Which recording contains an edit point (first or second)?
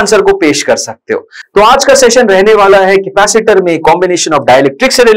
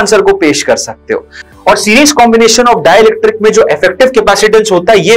second